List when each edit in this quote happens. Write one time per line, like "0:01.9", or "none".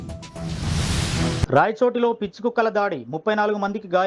0:01.5